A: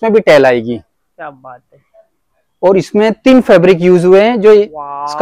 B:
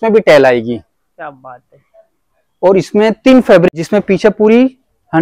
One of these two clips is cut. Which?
B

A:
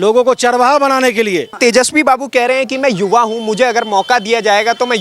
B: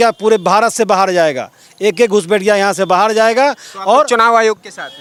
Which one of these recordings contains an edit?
A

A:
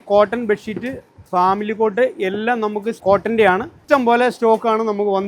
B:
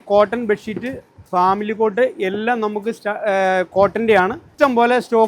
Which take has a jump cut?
A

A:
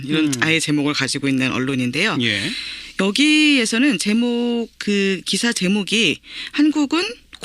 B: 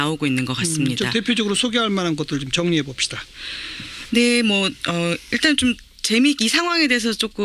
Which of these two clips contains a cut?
A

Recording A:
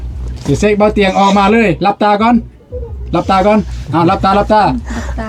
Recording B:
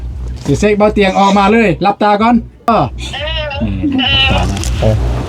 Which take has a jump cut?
B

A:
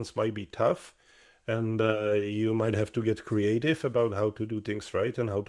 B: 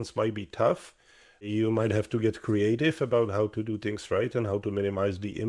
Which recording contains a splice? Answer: B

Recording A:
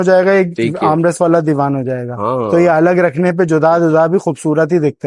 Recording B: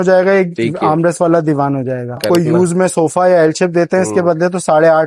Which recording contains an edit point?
B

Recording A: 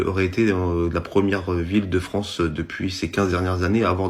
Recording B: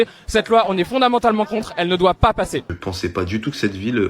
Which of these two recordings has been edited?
B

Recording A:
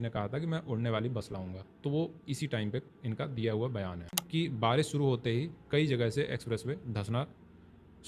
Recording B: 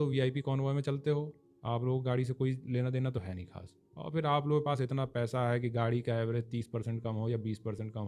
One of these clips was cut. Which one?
A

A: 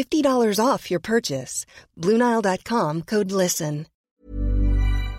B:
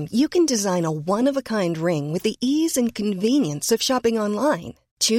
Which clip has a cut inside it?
A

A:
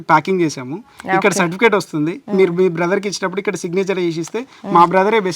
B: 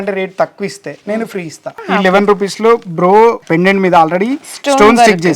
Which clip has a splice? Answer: B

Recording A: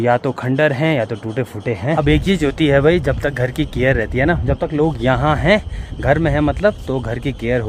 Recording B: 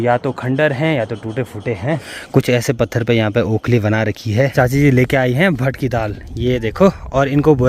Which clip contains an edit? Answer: B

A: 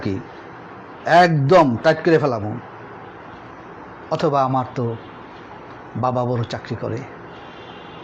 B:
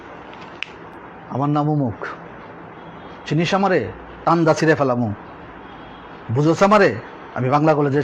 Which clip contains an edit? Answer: B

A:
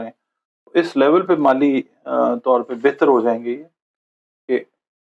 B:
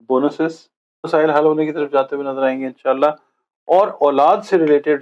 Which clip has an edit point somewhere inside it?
B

